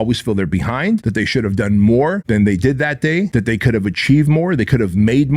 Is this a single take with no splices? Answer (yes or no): no